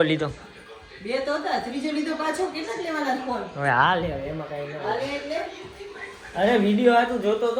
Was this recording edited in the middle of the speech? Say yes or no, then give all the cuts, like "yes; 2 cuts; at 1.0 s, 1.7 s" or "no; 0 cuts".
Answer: no; 0 cuts